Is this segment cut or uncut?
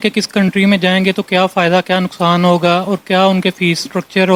uncut